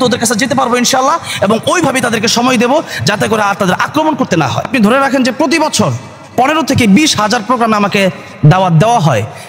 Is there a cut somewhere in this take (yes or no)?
yes